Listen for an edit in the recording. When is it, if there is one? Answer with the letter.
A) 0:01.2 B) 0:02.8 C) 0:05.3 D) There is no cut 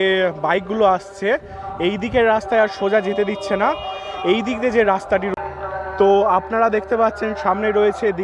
C